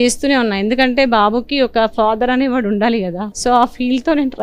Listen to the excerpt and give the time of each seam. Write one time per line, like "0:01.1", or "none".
0:03.2

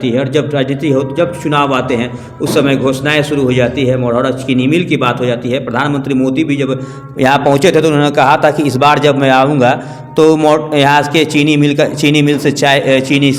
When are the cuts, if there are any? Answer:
none

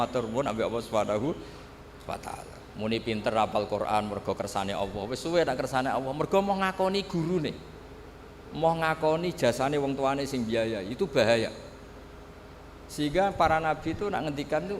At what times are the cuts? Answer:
0:02.6

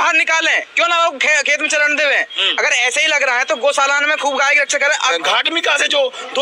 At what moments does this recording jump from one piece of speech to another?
0:05.1

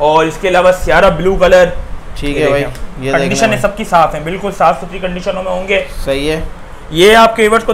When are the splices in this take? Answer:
none

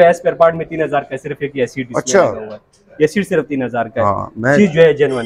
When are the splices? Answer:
none

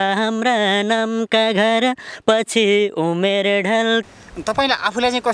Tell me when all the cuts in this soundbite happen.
0:04.0

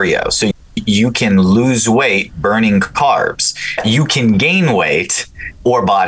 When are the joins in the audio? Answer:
0:03.7

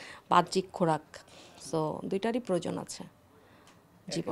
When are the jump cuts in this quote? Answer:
none

